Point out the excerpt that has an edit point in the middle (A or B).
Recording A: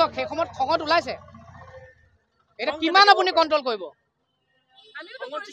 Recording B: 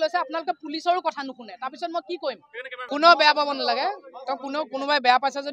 B